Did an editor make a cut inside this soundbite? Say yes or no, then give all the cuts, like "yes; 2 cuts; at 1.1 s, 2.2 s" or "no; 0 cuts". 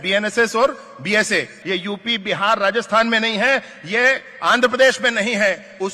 yes; 1 cut; at 1.6 s